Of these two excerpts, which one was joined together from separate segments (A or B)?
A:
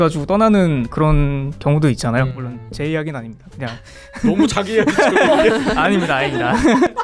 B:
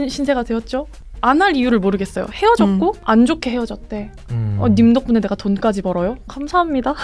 B